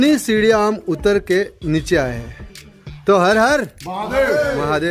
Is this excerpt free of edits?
yes; 0 cuts

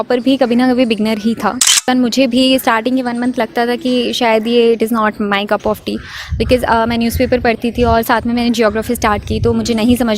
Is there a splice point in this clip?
yes; 1 cut; at 1.7 s

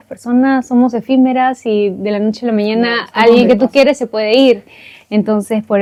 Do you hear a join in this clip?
no; 0 cuts

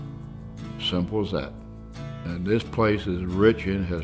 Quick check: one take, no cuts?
yes; 0 cuts

